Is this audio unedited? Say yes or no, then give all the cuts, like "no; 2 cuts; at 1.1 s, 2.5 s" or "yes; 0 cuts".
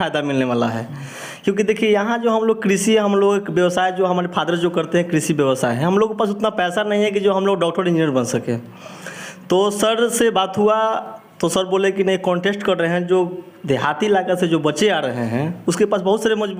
yes; 0 cuts